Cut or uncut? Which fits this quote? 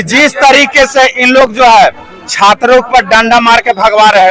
uncut